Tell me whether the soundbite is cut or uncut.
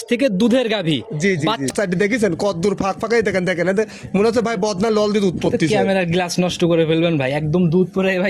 cut